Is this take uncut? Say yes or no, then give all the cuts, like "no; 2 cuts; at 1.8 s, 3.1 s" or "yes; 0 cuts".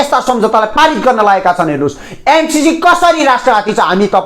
yes; 0 cuts